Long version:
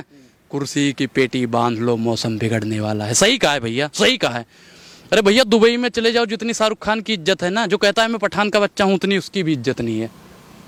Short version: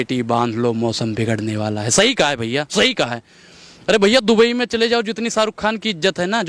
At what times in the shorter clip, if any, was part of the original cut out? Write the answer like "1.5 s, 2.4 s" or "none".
none